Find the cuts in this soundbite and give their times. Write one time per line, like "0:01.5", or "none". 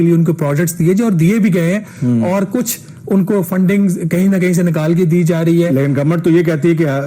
none

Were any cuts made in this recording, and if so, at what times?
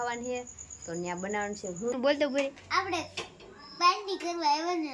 0:01.9

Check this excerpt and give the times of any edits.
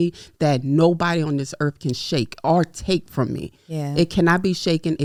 none

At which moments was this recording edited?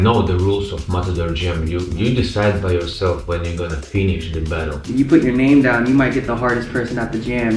0:04.8

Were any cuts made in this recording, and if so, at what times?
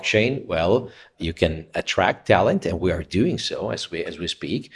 0:02.8

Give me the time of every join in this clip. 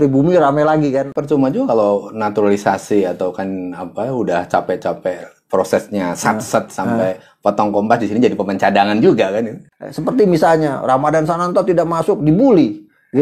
0:01.1
0:09.6

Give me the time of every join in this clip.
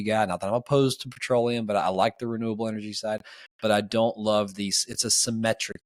none

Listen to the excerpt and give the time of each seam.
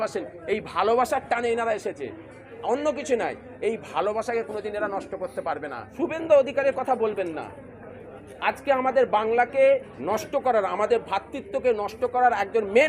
0:05.9

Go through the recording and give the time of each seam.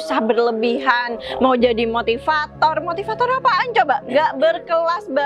none

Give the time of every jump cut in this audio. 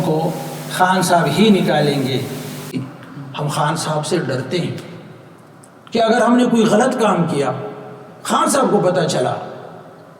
0:02.8

